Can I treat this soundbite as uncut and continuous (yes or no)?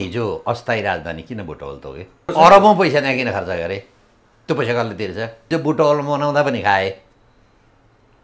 no